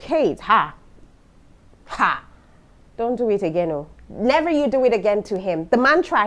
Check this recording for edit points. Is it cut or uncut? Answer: uncut